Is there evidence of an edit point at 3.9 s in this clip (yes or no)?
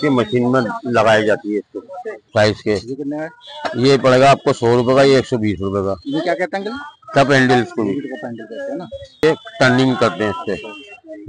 no